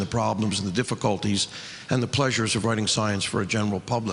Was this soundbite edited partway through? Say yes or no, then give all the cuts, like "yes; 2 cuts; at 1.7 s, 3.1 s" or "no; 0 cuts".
yes; 1 cut; at 2.1 s